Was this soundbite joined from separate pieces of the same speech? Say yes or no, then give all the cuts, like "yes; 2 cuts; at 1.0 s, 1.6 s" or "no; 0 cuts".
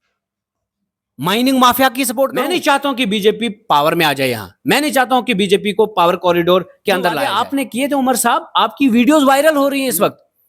yes; 2 cuts; at 2.4 s, 7.2 s